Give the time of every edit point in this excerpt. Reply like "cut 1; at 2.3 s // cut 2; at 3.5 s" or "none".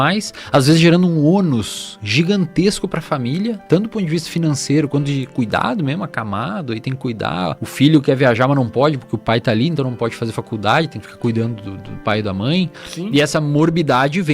cut 1; at 7.6 s // cut 2; at 12.9 s